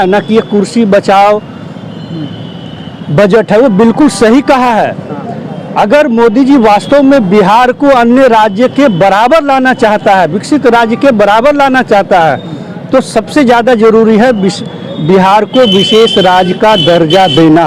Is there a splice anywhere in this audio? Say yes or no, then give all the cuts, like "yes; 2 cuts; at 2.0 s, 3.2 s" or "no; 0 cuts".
no; 0 cuts